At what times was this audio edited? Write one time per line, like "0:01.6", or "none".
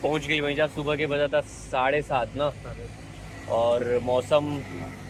none